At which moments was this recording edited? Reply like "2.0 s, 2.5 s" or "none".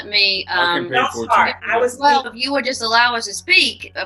2.3 s